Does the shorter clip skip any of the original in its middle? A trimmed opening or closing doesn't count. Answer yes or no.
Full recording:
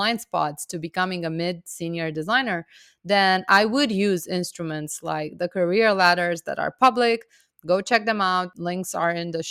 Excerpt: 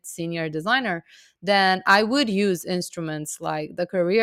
no